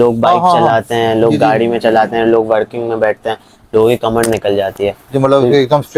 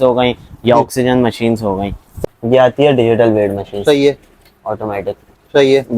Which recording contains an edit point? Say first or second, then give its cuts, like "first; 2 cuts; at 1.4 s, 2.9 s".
second; 1 cut; at 2.1 s